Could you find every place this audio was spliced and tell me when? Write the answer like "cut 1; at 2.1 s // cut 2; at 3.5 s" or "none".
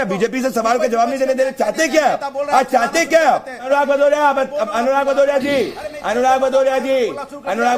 cut 1; at 3.7 s